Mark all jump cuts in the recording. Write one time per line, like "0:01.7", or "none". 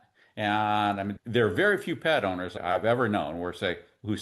0:01.1
0:02.5